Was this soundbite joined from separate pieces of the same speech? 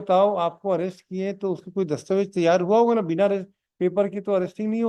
no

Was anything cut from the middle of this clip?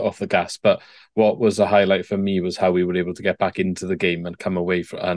no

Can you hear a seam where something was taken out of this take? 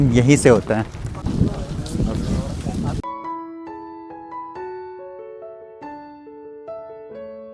no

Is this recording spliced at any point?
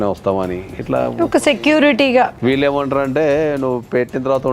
yes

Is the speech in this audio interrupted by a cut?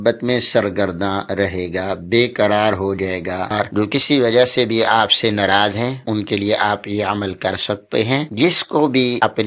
yes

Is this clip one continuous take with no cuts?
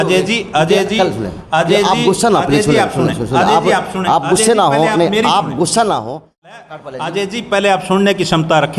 no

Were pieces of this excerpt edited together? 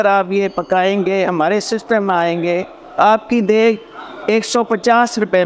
no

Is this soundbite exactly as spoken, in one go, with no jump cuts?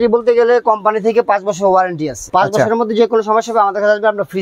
no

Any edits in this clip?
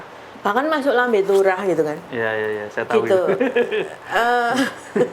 no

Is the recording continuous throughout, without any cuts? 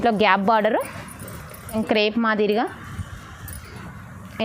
no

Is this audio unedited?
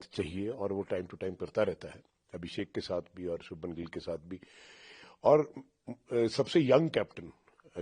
yes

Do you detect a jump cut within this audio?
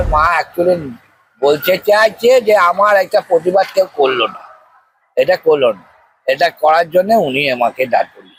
no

